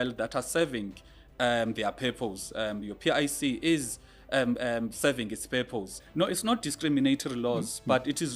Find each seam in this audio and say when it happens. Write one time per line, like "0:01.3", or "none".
0:06.0